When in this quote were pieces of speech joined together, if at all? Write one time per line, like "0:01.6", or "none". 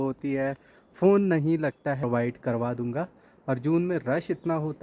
0:02.0